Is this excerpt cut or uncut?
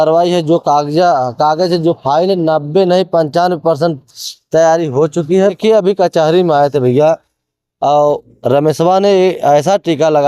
cut